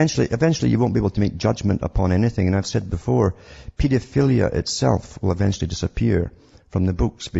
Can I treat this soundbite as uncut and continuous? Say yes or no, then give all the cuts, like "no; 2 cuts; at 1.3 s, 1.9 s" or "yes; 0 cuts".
yes; 0 cuts